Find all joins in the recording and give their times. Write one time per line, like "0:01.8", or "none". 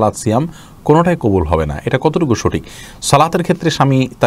none